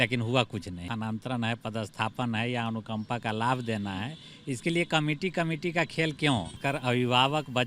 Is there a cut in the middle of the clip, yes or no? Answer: yes